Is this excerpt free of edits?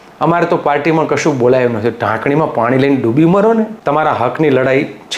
no; 1 cut; at 3.8 s

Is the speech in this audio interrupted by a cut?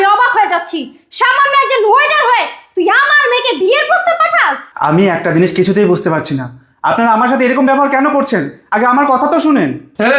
no; 0 cuts

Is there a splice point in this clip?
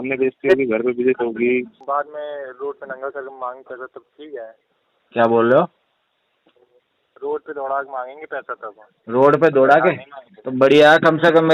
yes; 1 cut; at 1.8 s

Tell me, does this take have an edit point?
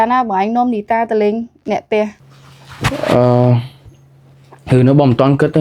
no; 0 cuts

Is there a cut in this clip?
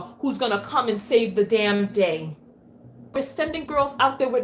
yes; 1 cut; at 3.1 s

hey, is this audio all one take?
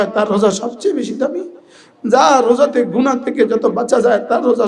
yes; 0 cuts

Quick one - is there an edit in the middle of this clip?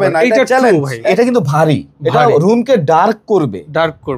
yes; 1 cut; at 1.1 s

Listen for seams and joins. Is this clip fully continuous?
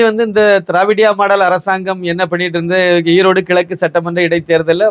yes; 0 cuts

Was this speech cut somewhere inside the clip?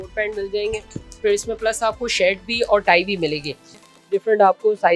yes; 1 cut; at 3.8 s

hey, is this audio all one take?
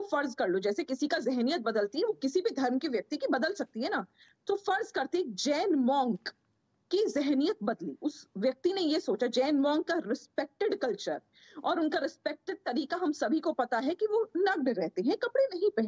yes; 0 cuts

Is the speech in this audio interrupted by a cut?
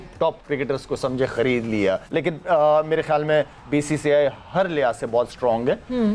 yes; 1 cut; at 2.0 s

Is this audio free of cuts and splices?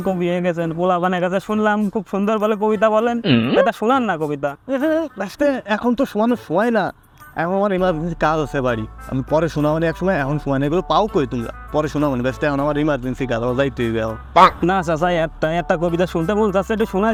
yes; 0 cuts

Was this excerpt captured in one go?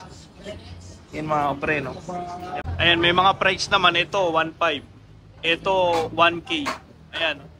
no; 1 cut; at 2.6 s

